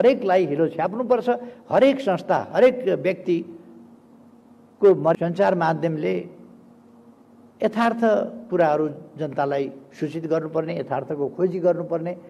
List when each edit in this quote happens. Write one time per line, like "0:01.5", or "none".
0:05.1

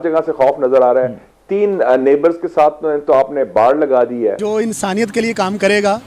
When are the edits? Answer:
0:04.4

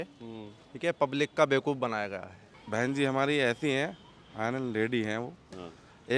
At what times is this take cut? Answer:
0:02.6

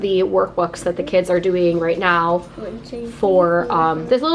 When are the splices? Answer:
none

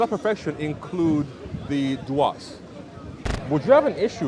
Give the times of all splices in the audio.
0:03.3

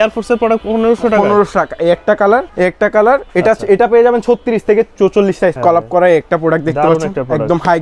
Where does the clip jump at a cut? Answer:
0:02.5
0:05.6

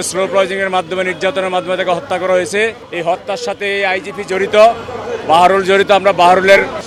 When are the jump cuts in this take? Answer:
none

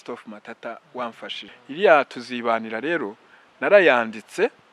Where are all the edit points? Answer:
0:01.5

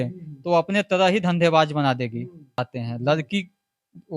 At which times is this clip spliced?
0:02.7

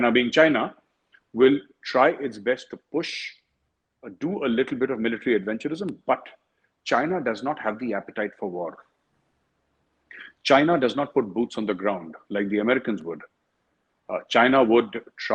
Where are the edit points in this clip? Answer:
none

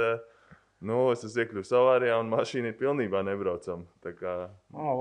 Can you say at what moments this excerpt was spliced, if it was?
none

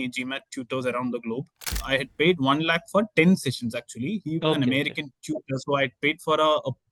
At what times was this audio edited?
0:01.8

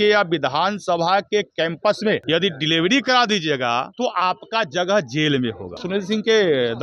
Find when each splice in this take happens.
0:02.2
0:03.9
0:05.8

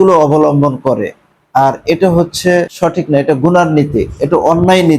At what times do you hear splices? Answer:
0:02.7

